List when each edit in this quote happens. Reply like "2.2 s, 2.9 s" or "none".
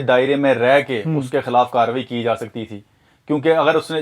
none